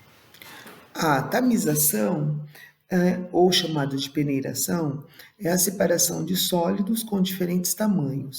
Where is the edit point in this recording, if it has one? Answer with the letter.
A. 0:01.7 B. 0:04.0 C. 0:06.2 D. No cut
C